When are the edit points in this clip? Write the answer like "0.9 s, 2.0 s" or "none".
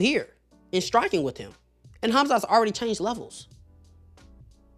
3.6 s